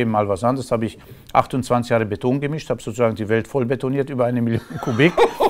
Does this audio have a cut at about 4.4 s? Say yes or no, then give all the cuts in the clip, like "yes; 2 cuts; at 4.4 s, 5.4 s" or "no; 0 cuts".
no; 1 cut; at 3.2 s